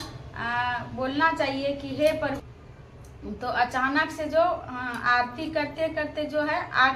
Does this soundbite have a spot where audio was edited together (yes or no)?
yes